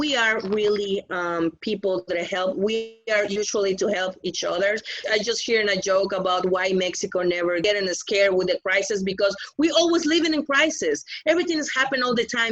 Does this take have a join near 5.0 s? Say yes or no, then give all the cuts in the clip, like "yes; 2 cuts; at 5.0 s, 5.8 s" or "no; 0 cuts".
yes; 2 cuts; at 5.0 s, 7.6 s